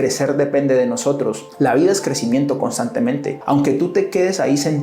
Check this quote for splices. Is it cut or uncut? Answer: cut